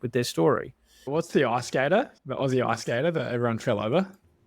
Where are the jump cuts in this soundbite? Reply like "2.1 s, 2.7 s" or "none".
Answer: 1.1 s